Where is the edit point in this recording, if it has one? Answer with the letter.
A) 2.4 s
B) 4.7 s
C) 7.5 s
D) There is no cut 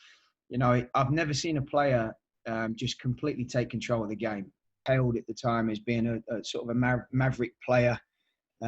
B